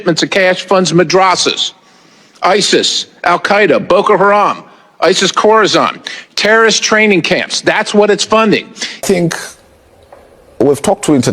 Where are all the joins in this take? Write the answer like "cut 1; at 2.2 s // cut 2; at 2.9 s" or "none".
cut 1; at 9.0 s